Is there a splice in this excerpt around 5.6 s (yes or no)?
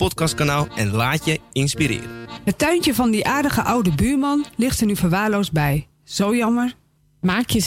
no